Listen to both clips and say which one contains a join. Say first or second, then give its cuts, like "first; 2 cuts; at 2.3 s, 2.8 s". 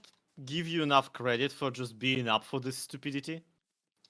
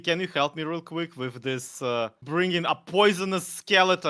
second; 1 cut; at 2.2 s